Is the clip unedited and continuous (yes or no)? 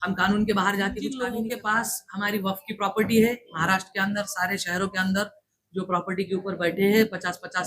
no